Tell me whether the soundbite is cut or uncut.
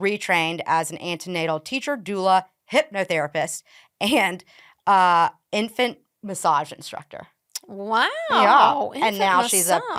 uncut